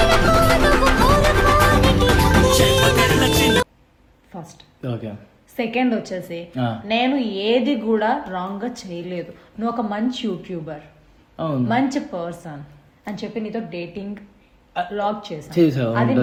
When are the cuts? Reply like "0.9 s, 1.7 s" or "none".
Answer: none